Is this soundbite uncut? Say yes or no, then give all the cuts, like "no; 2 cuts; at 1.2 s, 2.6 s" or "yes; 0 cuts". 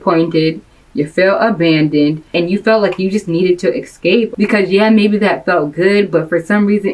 no; 2 cuts; at 2.3 s, 4.3 s